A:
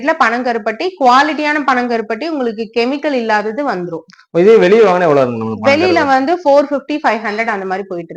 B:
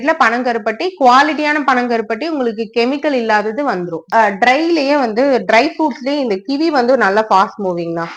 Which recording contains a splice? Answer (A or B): B